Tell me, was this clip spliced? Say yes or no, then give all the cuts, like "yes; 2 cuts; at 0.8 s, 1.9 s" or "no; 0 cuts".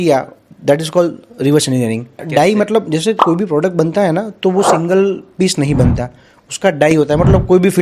yes; 1 cut; at 2.1 s